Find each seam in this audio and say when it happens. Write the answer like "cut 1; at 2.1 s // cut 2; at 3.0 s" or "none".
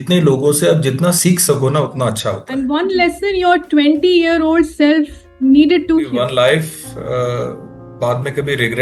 cut 1; at 2.4 s // cut 2; at 6.1 s